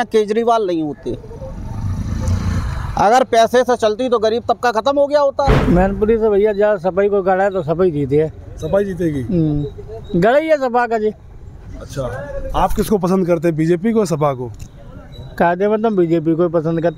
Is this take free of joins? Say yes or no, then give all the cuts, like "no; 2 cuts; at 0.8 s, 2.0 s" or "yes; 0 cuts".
no; 1 cut; at 5.6 s